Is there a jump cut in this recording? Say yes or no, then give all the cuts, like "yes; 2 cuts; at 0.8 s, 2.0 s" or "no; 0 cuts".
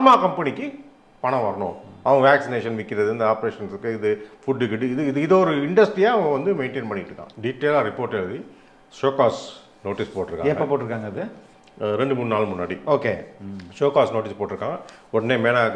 yes; 1 cut; at 7.2 s